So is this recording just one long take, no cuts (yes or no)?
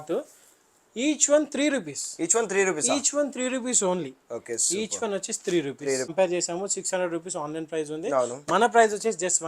no